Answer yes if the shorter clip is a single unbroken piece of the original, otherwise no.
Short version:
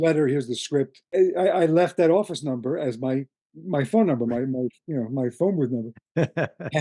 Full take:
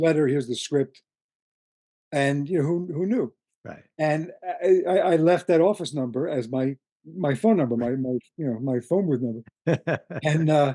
no